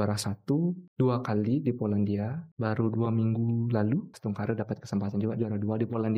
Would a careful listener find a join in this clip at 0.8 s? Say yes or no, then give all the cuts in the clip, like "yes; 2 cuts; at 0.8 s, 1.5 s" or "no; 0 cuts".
yes; 3 cuts; at 0.8 s, 2.4 s, 4.1 s